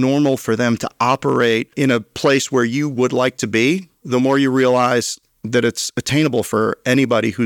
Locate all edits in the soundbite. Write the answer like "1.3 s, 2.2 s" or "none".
1.7 s